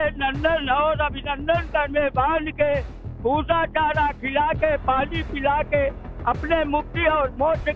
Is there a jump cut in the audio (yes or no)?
yes